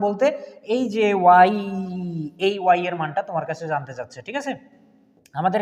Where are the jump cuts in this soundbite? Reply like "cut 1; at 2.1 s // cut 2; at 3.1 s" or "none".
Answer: none